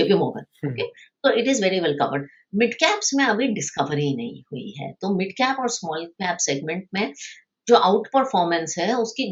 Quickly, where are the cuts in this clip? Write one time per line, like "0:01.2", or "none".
none